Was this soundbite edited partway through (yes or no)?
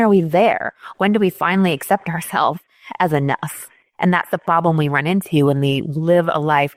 no